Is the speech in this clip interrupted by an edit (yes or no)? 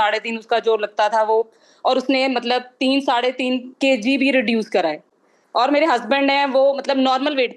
no